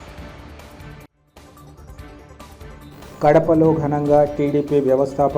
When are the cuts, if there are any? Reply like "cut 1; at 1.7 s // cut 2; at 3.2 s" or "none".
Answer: cut 1; at 2.9 s